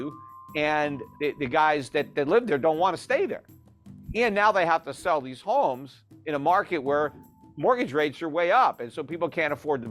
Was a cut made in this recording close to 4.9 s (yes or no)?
no